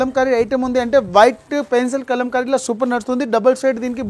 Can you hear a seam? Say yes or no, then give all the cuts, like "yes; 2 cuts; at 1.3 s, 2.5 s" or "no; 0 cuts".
no; 0 cuts